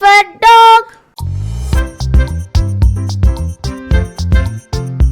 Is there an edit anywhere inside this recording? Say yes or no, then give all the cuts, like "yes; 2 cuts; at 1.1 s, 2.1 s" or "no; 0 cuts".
yes; 1 cut; at 1.1 s